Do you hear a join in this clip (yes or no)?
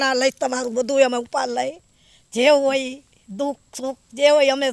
no